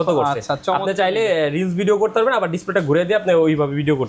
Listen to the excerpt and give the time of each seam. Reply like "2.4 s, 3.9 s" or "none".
none